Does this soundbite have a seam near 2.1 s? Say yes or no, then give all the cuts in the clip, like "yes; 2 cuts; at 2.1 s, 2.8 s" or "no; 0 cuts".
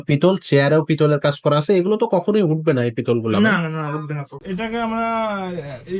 no; 1 cut; at 4.4 s